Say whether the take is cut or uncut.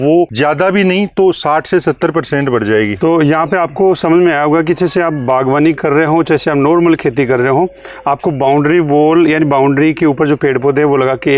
uncut